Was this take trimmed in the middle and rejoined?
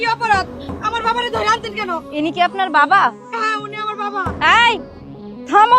yes; 1 cut; at 2.1 s

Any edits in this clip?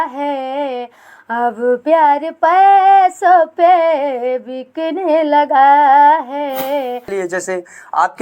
yes; 1 cut; at 7.1 s

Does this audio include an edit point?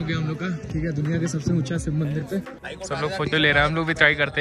yes; 1 cut; at 2.7 s

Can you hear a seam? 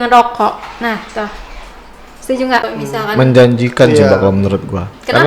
yes; 1 cut; at 2.7 s

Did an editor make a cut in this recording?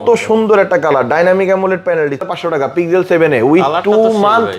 yes; 1 cut; at 2.2 s

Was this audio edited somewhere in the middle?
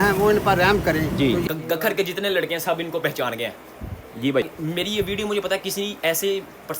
yes; 2 cuts; at 1.4 s, 4.5 s

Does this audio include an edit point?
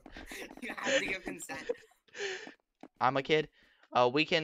yes; 1 cut; at 2.9 s

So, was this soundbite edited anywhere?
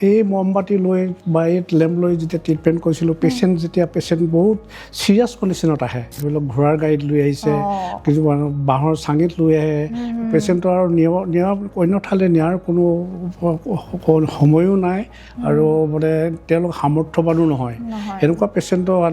yes; 1 cut; at 6.2 s

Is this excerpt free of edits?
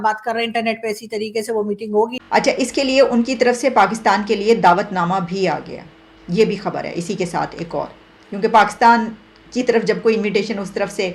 no; 1 cut; at 2.1 s

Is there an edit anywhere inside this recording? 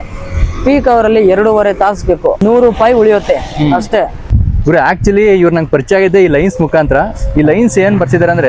yes; 2 cuts; at 2.4 s, 4.2 s

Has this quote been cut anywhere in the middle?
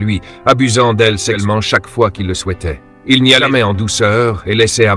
yes; 2 cuts; at 1.4 s, 3.4 s

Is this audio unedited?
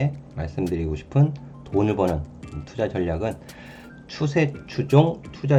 yes; 0 cuts

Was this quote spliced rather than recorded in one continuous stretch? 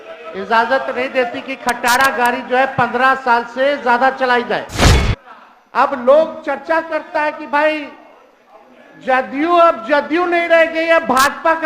yes; 1 cut; at 4.8 s

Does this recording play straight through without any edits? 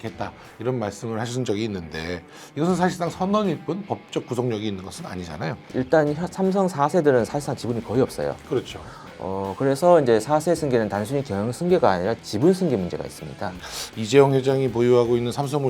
no; 1 cut; at 5.7 s

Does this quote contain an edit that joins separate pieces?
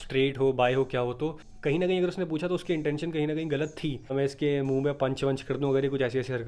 yes; 2 cuts; at 1.5 s, 4.1 s

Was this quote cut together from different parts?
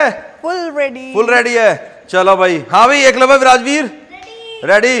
no; 0 cuts

